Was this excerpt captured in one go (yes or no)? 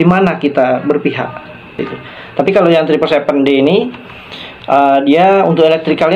no